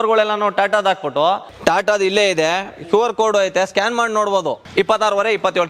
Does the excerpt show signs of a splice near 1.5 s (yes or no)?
yes